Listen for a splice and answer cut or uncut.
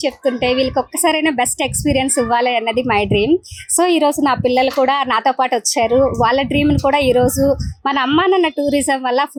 uncut